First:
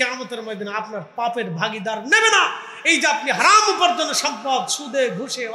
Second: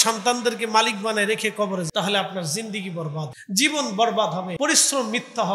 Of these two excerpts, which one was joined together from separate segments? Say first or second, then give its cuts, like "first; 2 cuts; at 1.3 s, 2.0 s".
second; 3 cuts; at 1.9 s, 3.4 s, 4.5 s